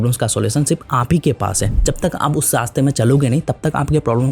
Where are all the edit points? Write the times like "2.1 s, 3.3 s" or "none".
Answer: 1.8 s